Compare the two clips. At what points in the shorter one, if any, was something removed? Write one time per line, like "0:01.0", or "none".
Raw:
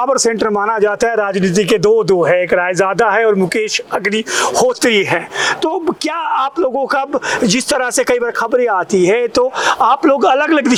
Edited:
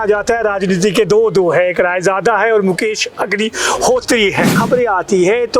0:04.6

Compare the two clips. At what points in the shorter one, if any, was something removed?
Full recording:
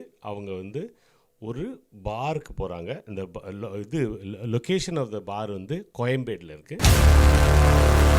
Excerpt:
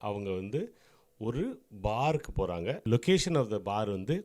0:02.8

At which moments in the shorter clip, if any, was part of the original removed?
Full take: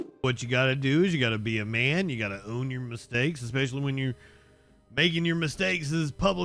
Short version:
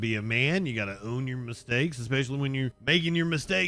0:02.8

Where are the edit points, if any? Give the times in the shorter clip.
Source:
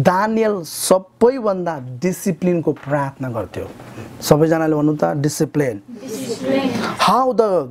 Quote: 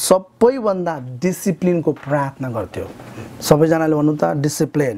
none

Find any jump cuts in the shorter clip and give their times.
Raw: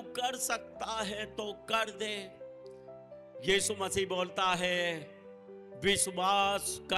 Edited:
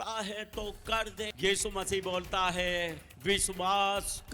0:01.3
0:03.1

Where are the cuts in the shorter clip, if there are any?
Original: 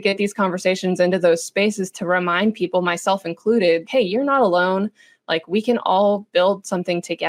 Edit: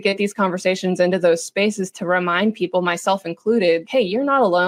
none

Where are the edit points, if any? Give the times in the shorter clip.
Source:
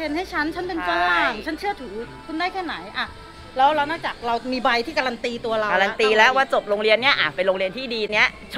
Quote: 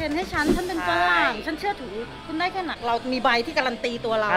0:02.8

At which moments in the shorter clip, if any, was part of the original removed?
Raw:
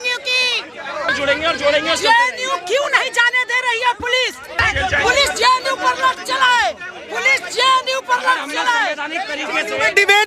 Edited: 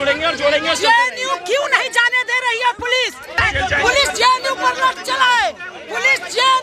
none

